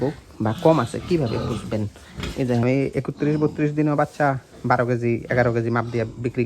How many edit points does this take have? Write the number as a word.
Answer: one